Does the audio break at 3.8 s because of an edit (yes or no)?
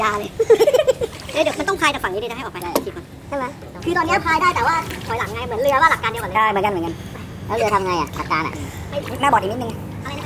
yes